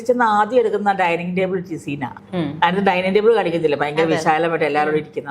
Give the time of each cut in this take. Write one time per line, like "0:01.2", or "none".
0:02.2